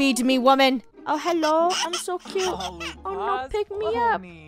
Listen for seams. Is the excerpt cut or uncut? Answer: cut